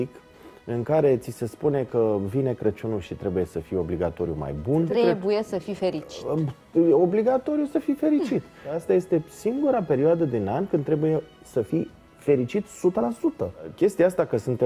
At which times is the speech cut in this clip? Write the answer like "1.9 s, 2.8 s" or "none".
4.9 s, 8.7 s, 13.7 s